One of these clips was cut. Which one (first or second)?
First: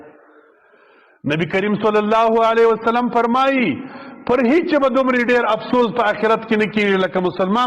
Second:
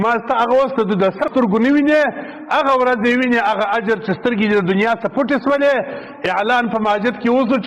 second